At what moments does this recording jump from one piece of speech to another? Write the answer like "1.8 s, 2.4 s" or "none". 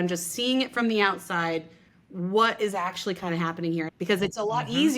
3.9 s